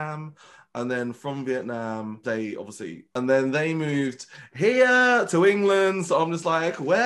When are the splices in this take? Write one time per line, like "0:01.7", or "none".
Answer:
0:02.2
0:03.1